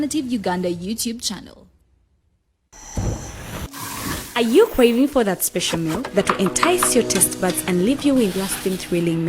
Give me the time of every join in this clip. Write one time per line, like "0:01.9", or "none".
0:02.7